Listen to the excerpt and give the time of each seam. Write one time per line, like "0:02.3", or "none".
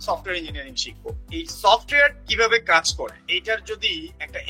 none